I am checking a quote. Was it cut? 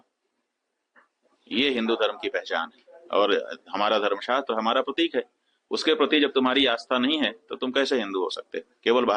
no; 0 cuts

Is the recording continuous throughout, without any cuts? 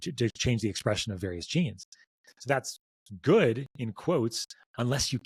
yes; 0 cuts

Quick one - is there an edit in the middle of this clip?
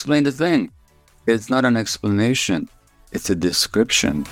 yes; 1 cut; at 1.0 s

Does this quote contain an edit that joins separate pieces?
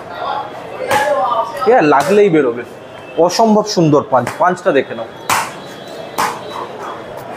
no; 0 cuts

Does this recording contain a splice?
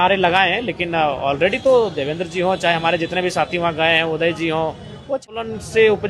yes; 1 cut; at 5.2 s

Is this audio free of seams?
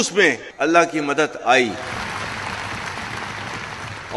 yes; 0 cuts

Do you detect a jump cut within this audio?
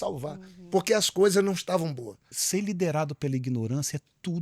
yes; 1 cut; at 2.4 s

